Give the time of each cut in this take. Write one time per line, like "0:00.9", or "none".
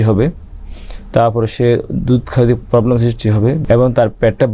0:03.6